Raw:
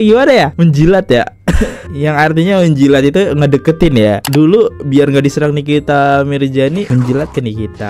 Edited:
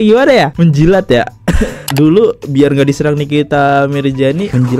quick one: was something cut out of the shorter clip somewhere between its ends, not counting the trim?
yes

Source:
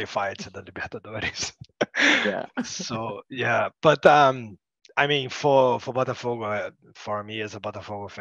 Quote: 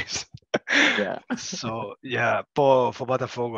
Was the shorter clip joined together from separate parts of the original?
yes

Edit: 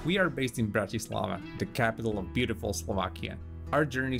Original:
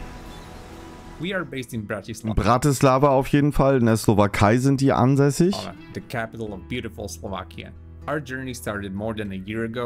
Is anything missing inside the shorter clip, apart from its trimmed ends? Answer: yes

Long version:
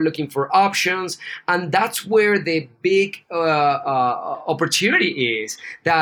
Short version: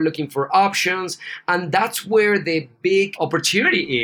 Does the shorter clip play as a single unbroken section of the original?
no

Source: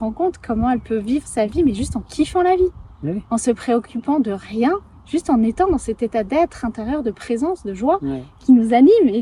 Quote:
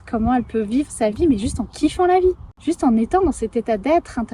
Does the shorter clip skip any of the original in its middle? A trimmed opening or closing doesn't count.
yes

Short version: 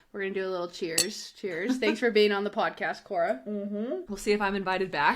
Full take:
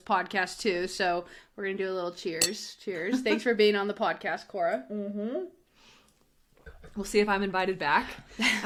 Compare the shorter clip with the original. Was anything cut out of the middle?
yes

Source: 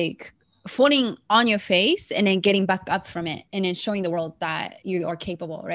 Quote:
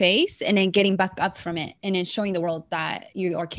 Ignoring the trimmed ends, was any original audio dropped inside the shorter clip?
no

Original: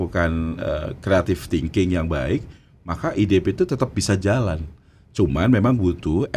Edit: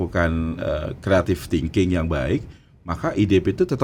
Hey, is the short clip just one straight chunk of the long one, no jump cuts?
yes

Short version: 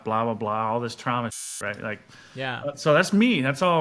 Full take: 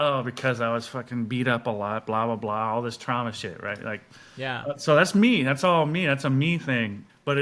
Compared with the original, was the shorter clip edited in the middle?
no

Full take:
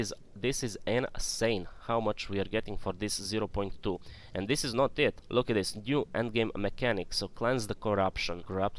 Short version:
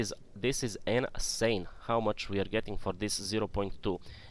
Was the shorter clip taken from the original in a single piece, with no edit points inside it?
yes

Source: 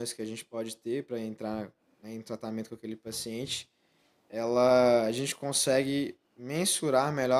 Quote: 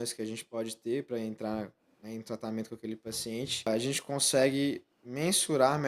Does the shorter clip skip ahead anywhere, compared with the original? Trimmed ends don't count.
yes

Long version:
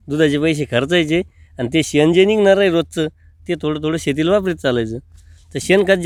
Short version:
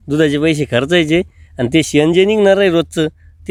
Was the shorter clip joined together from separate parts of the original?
no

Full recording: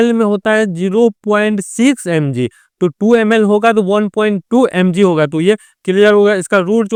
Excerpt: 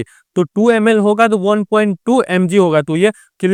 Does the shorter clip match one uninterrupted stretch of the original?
yes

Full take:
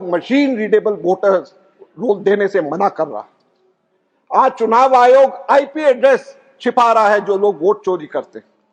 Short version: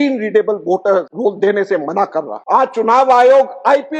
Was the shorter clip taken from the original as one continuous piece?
no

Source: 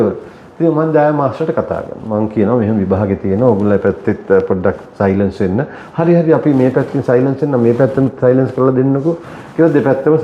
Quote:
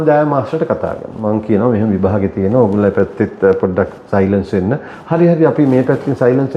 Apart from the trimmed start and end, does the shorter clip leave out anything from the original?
no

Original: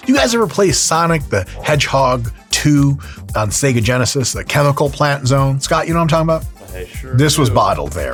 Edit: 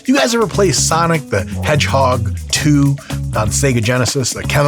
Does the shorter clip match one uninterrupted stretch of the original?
yes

